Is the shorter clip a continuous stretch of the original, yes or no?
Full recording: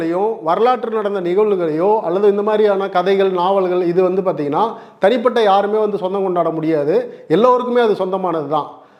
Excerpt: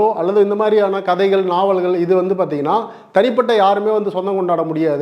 yes